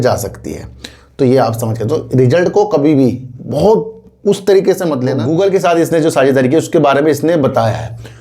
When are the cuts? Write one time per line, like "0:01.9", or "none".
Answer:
0:05.2